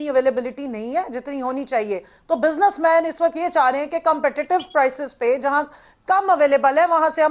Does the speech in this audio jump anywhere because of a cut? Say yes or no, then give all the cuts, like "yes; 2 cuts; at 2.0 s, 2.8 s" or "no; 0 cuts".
no; 0 cuts